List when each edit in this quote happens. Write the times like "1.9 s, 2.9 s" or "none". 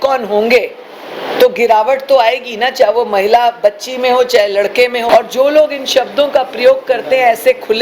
5.1 s